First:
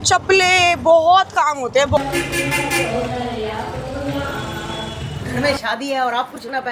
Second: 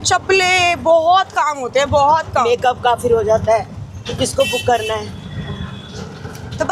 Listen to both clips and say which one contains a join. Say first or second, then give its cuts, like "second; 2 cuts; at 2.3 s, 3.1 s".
first; 2 cuts; at 2.0 s, 5.2 s